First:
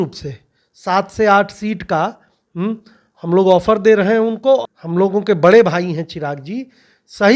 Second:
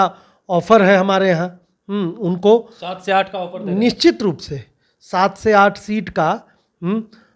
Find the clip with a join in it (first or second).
first